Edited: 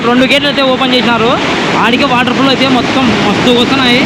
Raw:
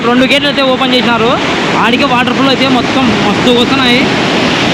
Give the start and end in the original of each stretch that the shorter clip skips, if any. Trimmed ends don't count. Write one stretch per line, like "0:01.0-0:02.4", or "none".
none